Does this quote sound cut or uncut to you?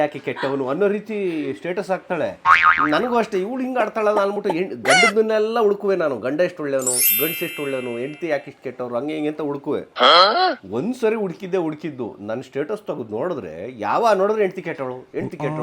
cut